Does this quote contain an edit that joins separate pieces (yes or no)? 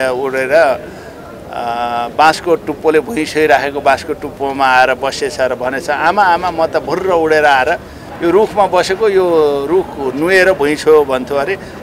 no